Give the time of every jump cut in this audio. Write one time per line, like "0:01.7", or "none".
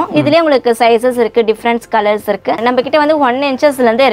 0:02.6